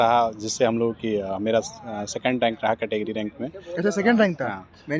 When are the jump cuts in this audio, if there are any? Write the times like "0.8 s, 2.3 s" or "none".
none